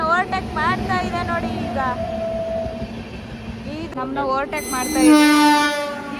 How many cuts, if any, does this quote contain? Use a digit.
1